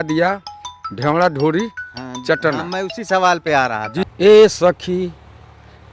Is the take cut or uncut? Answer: cut